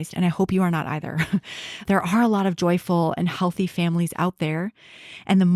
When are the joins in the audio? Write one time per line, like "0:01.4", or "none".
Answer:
0:01.8